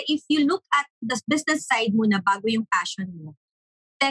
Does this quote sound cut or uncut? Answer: cut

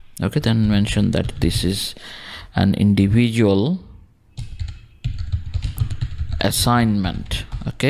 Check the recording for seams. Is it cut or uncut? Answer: cut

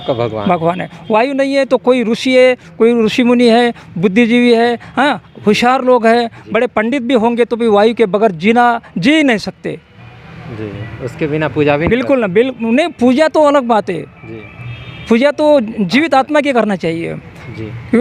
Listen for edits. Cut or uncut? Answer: uncut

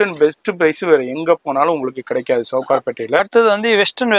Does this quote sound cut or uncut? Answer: cut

